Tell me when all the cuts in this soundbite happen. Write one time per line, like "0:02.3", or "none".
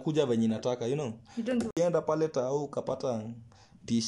0:01.7